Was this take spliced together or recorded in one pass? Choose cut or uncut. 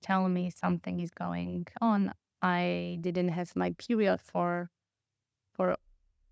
uncut